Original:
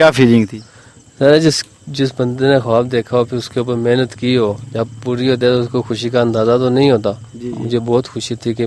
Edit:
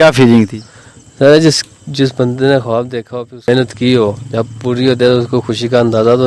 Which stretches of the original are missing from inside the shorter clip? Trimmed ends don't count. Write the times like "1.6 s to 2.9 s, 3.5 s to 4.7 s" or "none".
3.5 s to 3.9 s